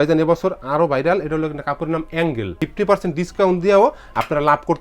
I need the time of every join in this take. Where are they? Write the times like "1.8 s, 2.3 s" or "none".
2.6 s